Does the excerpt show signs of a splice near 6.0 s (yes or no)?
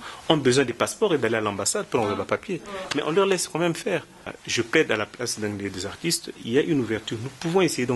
no